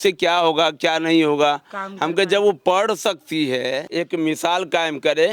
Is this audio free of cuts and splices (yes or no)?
no